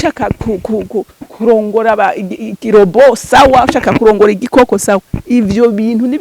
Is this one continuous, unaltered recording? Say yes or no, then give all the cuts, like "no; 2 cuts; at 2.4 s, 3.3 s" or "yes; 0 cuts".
yes; 0 cuts